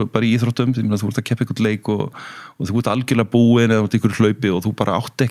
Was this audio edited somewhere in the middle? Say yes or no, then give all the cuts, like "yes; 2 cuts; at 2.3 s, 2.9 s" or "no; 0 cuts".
no; 0 cuts